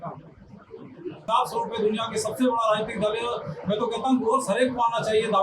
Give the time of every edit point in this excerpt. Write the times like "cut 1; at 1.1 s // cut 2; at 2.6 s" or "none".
cut 1; at 1.3 s